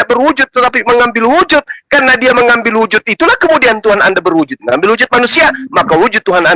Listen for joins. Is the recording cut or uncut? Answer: uncut